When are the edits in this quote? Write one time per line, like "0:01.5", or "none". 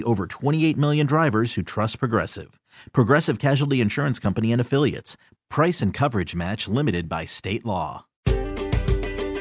0:08.2